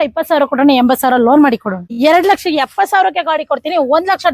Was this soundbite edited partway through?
yes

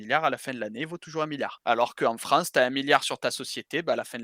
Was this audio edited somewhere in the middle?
yes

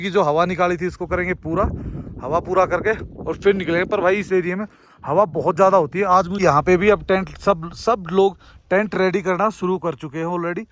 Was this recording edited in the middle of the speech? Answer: yes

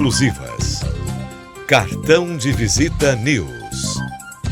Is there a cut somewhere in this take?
yes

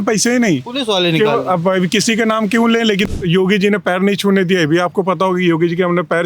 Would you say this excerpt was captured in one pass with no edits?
no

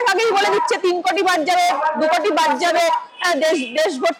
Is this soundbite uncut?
yes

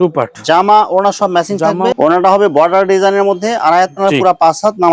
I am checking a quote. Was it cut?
yes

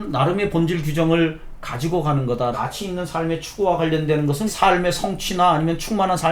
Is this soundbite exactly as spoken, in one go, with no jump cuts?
no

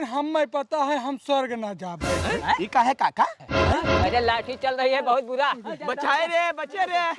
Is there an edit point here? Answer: yes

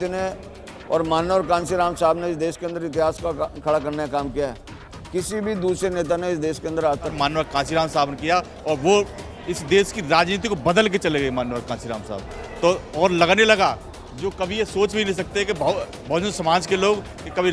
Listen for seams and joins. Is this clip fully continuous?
no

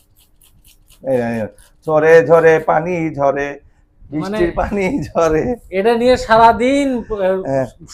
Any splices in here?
no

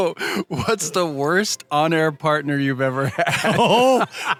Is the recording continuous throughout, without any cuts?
yes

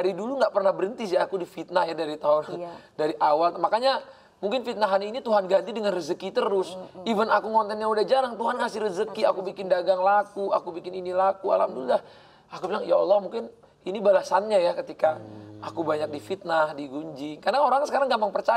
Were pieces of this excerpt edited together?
no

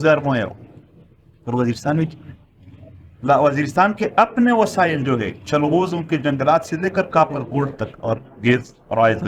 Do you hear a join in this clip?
no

